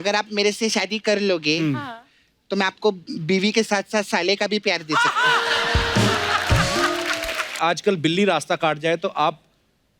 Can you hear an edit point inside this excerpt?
yes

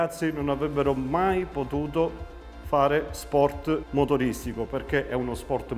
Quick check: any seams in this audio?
no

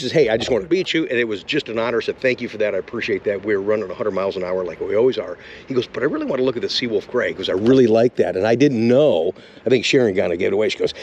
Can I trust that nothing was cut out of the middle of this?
yes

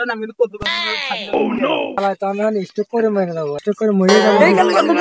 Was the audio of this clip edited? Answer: yes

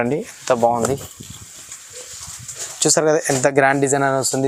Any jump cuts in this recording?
no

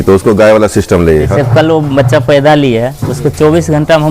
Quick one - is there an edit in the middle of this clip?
yes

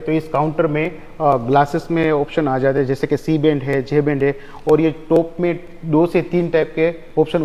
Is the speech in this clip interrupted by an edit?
no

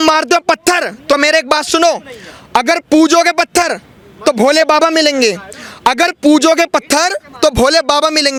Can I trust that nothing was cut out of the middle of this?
yes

